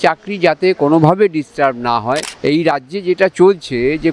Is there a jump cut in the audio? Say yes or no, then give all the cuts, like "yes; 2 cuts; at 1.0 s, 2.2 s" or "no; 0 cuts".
yes; 1 cut; at 2.3 s